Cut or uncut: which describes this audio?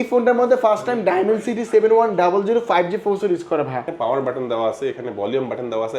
cut